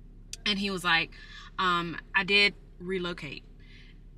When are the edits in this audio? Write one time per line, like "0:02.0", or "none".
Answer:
none